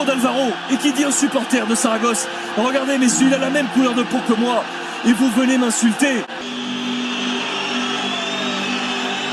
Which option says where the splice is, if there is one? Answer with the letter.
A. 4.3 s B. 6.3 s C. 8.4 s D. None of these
B